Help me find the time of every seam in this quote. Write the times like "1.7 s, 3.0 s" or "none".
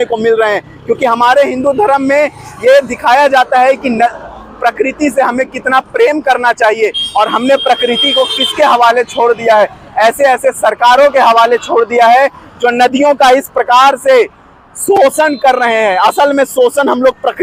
none